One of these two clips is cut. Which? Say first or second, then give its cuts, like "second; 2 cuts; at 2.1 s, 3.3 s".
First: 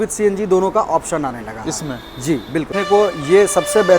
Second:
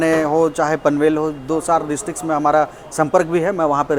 first; 1 cut; at 2.7 s